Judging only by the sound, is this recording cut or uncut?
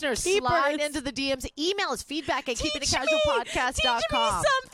uncut